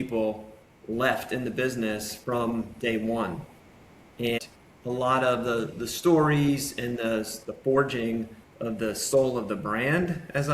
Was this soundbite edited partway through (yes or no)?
yes